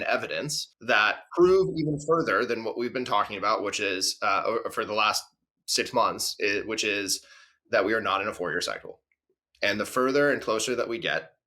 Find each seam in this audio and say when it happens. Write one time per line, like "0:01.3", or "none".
0:01.1